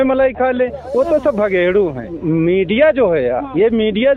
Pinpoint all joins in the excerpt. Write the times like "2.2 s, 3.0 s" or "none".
2.1 s